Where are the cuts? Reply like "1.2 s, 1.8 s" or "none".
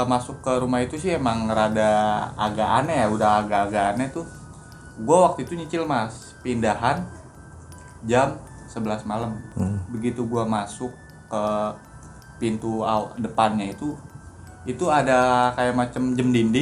9.5 s